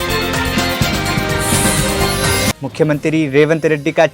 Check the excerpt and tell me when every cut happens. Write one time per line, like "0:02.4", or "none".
0:02.5